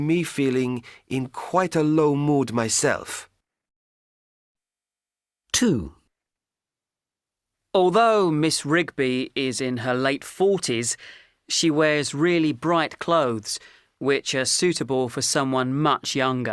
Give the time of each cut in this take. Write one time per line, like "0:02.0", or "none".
0:15.6